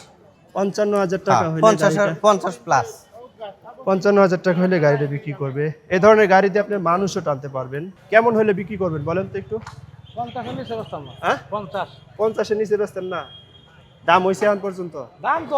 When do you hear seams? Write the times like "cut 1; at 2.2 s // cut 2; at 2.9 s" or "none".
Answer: cut 1; at 7.9 s